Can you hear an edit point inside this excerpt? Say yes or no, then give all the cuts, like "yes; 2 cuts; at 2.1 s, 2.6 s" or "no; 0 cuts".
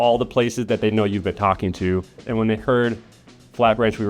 yes; 1 cut; at 2.2 s